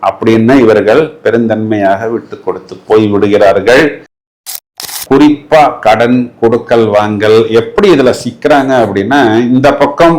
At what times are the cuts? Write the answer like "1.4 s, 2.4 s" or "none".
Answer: 4.4 s